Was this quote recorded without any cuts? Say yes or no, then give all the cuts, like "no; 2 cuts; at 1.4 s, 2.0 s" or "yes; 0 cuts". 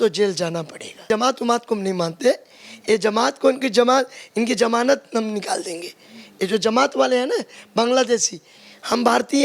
no; 1 cut; at 1.0 s